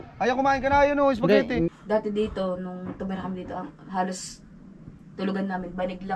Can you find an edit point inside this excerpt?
yes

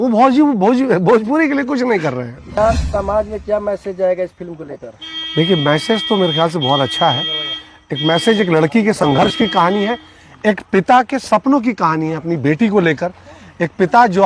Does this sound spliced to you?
yes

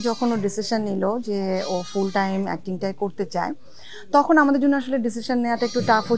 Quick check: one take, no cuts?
yes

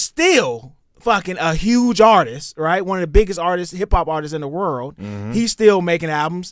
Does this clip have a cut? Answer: no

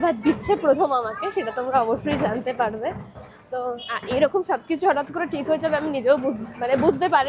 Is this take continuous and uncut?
yes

